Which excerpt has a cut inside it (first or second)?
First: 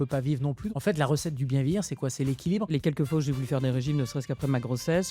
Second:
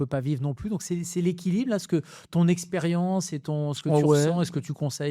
first